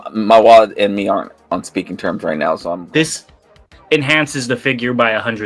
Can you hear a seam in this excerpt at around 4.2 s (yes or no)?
no